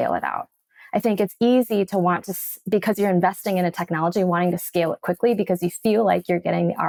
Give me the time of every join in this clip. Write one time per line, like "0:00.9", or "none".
none